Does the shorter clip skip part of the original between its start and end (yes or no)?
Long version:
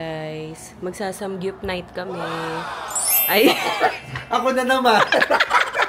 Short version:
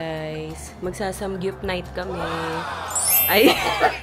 no